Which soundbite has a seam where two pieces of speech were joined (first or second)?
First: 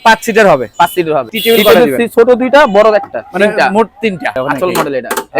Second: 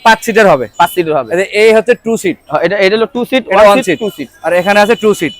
first